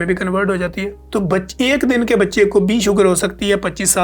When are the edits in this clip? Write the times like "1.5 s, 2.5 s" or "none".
0.9 s